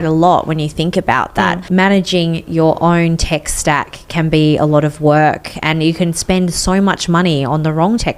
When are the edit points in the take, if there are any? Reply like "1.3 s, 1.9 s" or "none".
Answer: 1.6 s